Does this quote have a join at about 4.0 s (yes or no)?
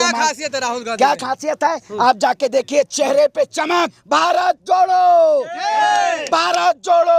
yes